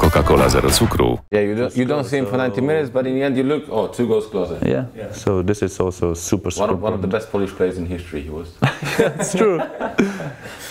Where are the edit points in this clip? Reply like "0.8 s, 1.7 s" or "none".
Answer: 1.3 s